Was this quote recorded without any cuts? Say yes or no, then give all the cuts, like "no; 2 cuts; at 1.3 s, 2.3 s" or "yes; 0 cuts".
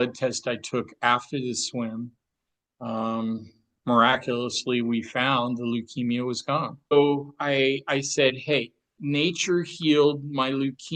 no; 2 cuts; at 6.9 s, 8.9 s